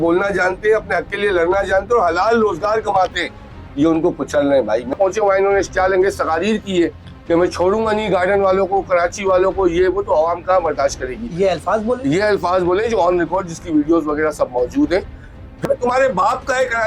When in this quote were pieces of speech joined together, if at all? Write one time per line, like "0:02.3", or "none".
0:04.9
0:15.6

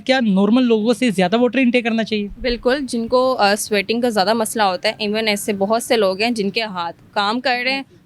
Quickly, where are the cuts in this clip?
none

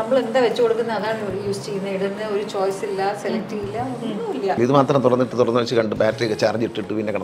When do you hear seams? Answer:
0:04.6

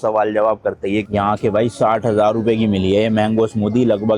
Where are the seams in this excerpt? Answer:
0:01.1

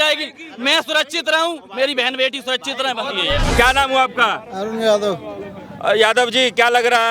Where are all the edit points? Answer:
0:03.5

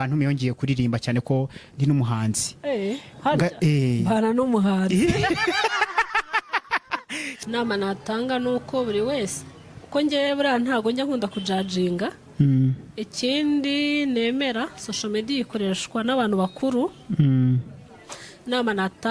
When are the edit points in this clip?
0:07.2

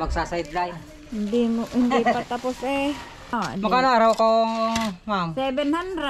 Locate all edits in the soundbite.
0:03.3

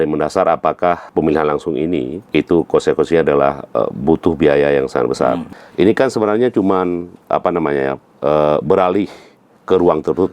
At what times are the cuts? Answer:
0:01.1
0:02.2
0:05.6

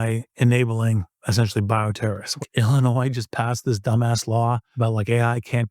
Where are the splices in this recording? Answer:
0:02.4
0:04.7

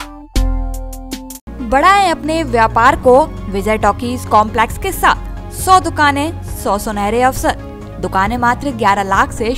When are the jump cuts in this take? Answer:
none

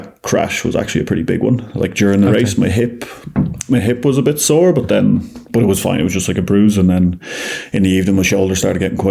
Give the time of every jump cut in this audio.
none

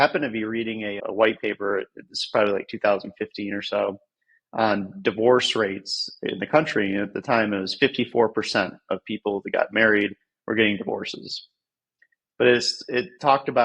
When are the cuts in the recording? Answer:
0:01.0

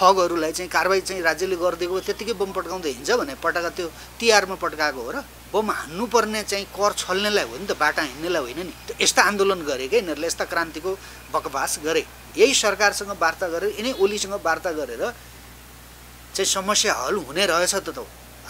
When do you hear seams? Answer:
0:05.3
0:08.8
0:12.2

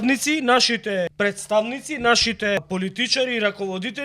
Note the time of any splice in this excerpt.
0:01.1
0:02.6

